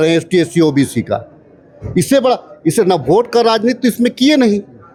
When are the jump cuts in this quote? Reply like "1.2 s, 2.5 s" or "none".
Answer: none